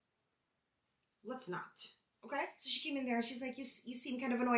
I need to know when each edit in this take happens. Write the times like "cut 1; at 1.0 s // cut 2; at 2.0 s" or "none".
cut 1; at 2.7 s